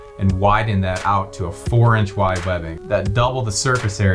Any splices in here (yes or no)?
yes